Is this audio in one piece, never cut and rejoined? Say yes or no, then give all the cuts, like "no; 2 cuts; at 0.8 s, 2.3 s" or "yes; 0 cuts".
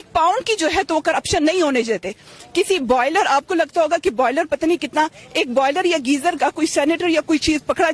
yes; 0 cuts